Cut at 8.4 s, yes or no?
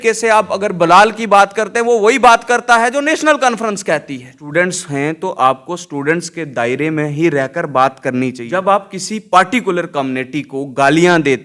yes